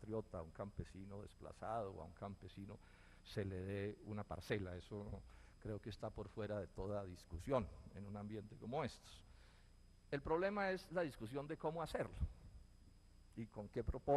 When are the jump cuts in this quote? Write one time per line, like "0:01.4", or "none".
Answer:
0:09.7